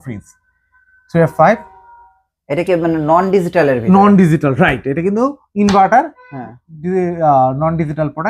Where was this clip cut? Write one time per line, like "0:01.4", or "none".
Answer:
none